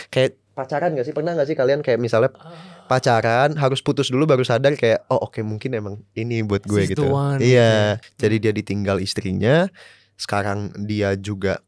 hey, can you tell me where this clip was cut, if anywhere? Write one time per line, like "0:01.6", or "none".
0:08.0

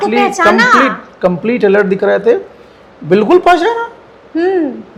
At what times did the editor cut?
none

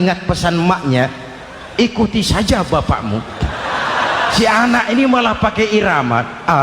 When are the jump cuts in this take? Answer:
0:04.4

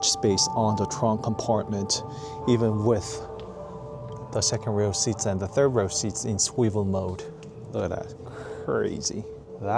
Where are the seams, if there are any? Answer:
none

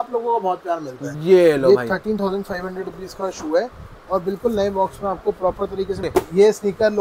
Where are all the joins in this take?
0:01.1
0:06.1

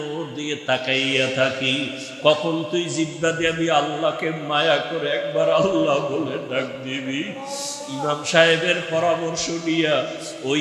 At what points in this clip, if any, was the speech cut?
none

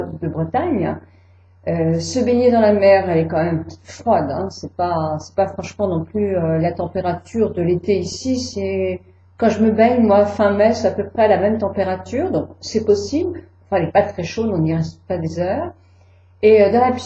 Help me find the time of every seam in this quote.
none

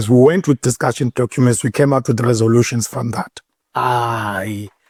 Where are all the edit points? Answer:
none

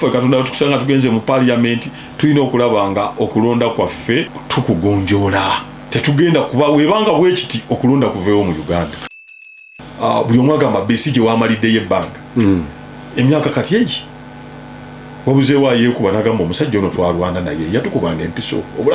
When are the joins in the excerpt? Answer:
0:04.4
0:05.8
0:09.4

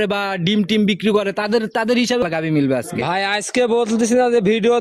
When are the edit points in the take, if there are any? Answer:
0:02.2

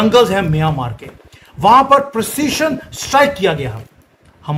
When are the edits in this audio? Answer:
none

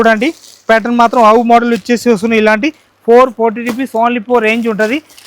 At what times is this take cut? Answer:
none

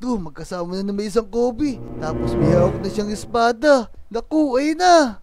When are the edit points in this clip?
none

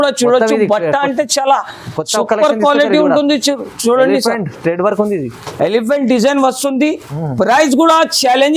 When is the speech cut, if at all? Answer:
none

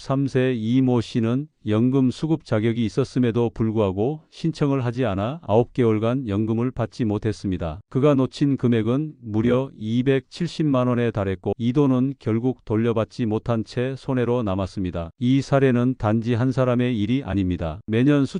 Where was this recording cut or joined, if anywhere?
none

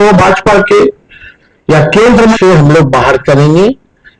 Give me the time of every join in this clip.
0:02.4

